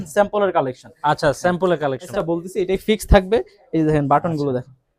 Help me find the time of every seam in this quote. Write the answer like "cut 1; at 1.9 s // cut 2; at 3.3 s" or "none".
cut 1; at 2.1 s